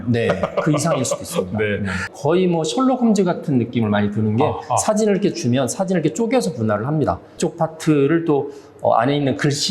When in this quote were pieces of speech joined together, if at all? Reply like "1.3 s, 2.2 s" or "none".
2.1 s, 7.4 s